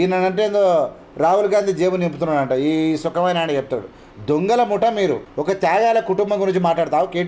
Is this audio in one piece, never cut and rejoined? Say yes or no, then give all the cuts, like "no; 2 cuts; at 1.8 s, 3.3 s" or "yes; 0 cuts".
yes; 0 cuts